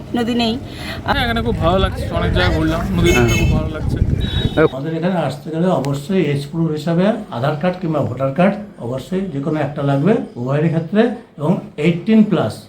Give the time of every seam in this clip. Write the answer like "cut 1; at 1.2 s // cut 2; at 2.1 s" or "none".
cut 1; at 1.1 s // cut 2; at 4.8 s